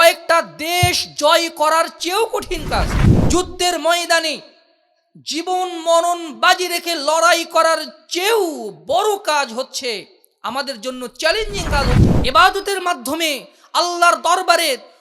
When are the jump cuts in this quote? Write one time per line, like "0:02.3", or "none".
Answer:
0:12.1